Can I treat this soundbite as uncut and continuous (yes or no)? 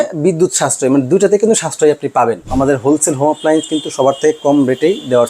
no